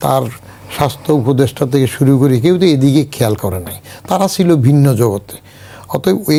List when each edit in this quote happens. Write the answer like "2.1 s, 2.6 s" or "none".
none